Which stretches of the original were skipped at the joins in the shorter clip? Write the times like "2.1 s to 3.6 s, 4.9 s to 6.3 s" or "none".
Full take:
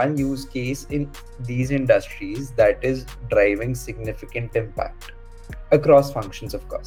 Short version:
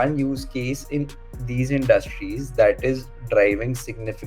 none

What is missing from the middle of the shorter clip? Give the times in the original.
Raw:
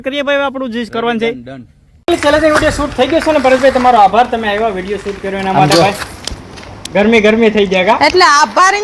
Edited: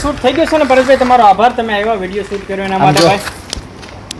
none

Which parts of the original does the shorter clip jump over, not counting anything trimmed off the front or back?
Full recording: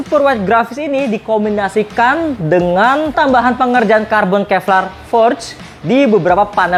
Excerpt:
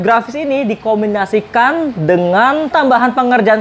none

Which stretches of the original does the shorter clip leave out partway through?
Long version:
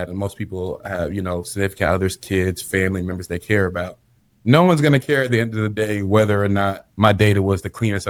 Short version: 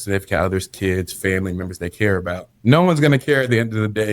4.0 s to 4.3 s

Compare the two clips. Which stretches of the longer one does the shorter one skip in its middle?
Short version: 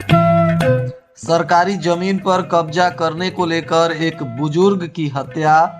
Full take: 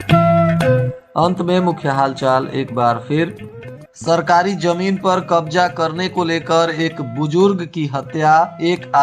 1.0 s to 3.8 s

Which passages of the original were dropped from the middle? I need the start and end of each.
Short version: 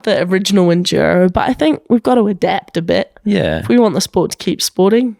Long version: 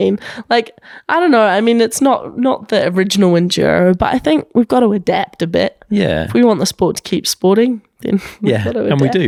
none

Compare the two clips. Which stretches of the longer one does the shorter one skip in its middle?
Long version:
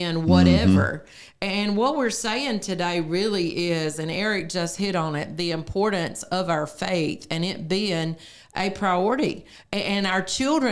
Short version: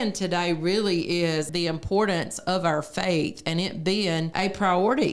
4.0 s to 5.3 s, 8.1 s to 8.5 s

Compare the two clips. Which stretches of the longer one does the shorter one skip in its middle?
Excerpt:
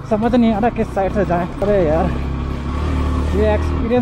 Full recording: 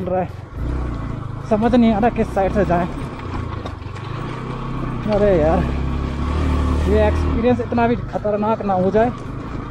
3.0 s to 5.2 s

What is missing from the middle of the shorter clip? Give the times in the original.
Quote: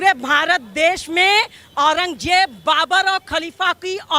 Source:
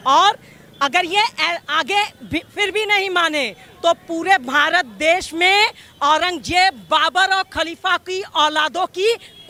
none

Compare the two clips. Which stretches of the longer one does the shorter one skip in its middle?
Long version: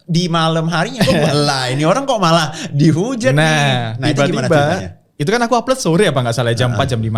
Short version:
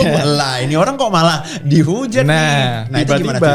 none

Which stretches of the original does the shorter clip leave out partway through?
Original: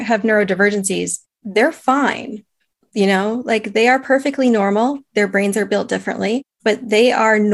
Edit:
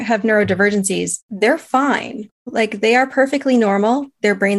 1.2 s to 1.3 s, 2.6 s to 3.4 s

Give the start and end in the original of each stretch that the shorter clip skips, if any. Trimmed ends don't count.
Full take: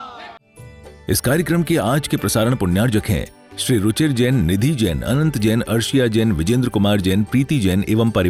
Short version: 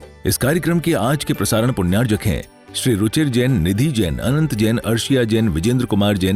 none

